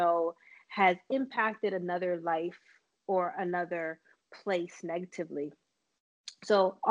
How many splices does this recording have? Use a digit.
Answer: 0